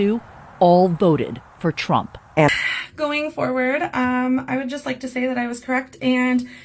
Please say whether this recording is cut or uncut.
cut